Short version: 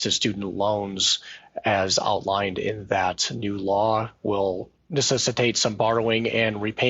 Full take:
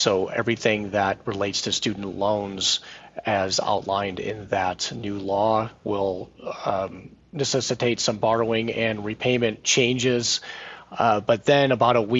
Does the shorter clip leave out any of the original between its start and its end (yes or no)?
yes